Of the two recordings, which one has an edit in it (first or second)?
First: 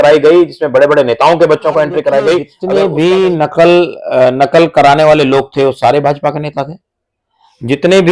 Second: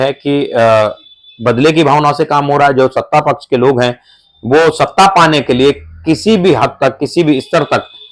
first